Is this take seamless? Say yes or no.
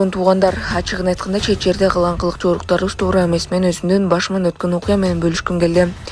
yes